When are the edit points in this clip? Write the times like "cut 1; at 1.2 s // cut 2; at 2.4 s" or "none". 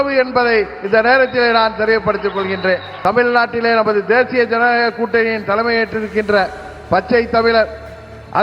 cut 1; at 2.9 s